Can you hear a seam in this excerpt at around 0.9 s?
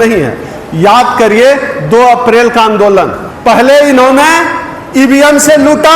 no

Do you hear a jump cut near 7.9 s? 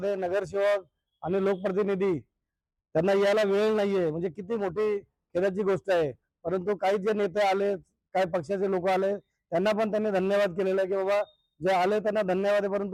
no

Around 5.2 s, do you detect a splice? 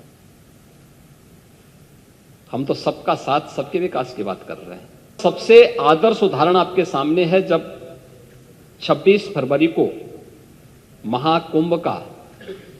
yes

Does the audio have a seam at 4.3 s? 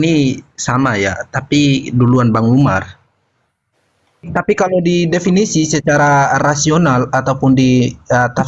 yes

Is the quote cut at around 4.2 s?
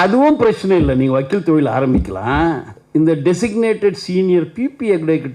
no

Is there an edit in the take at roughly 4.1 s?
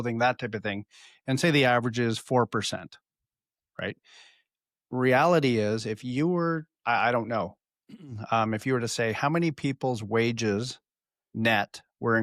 no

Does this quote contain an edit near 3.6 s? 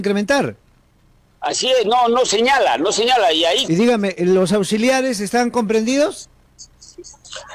yes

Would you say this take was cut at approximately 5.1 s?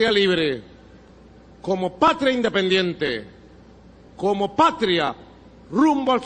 no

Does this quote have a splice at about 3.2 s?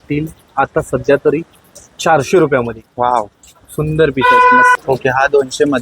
no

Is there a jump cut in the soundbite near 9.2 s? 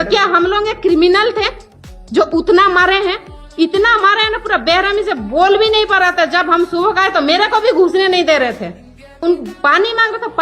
yes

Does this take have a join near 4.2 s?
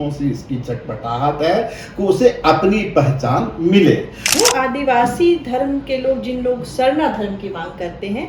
yes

